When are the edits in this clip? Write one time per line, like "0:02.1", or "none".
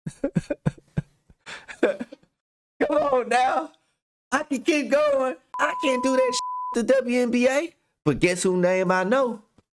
0:05.6